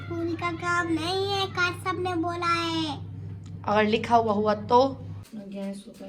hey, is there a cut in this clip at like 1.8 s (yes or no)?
no